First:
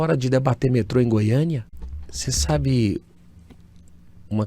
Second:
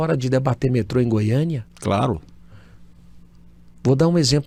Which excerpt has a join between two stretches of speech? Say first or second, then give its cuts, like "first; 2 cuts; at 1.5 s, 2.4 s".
first; 1 cut; at 1.7 s